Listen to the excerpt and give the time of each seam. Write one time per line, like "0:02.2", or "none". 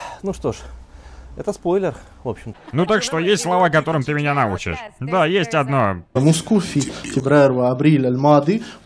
0:02.5